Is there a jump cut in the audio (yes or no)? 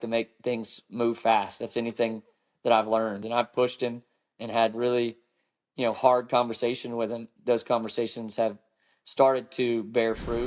yes